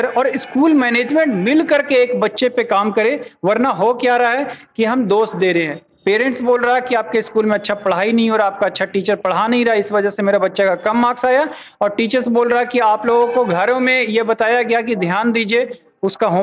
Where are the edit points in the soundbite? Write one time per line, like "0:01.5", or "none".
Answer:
none